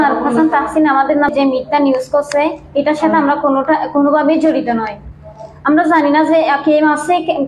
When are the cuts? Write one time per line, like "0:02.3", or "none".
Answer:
0:01.3